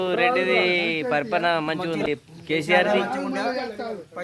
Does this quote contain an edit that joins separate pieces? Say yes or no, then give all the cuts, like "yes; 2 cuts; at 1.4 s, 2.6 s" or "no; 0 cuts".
yes; 1 cut; at 2.1 s